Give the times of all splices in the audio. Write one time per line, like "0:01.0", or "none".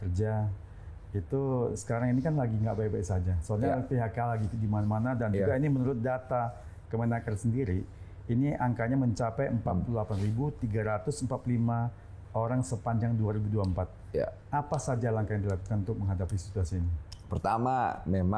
none